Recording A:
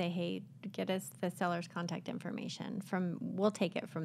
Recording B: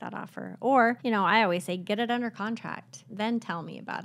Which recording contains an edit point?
B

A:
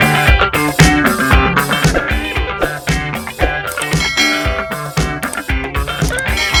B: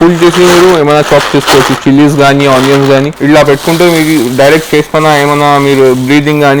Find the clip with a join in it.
B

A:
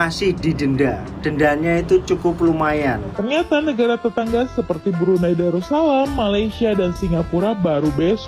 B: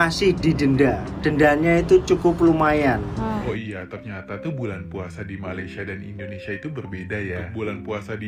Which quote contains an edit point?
A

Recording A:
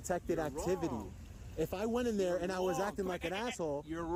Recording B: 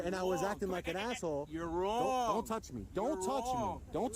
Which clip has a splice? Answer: B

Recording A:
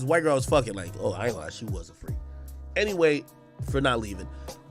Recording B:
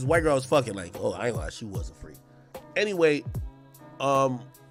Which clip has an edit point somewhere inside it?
A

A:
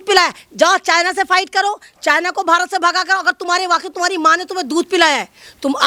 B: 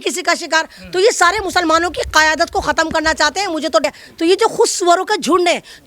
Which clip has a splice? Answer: B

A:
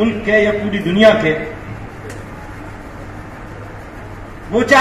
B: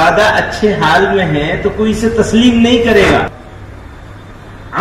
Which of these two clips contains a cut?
B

